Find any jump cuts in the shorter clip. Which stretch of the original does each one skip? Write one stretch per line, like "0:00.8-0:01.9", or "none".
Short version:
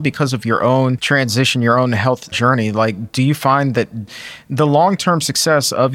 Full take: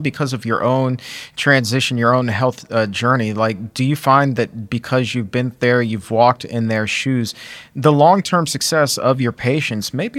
0:01.0-0:01.4
0:02.7-0:02.9
0:04.7-0:07.4